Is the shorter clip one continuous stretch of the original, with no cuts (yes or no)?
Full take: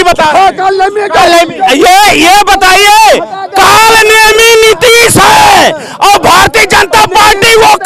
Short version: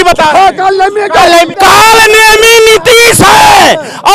no